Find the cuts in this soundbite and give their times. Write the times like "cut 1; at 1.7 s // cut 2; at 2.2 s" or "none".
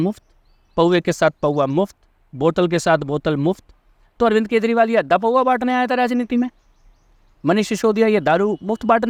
none